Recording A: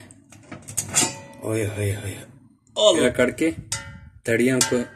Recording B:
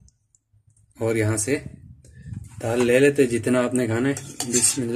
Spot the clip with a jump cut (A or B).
A